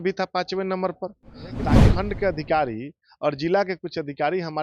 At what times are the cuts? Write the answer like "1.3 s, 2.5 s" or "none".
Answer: 1.8 s

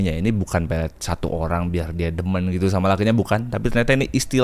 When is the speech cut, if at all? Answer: none

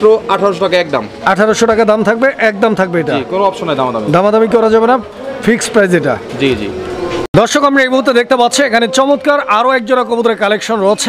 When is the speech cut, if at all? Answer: none

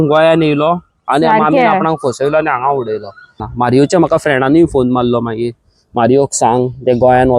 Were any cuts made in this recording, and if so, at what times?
3.5 s

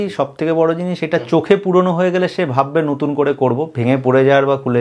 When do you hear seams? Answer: none

